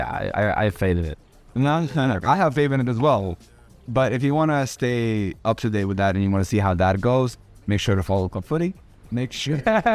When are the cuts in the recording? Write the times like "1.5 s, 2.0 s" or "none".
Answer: none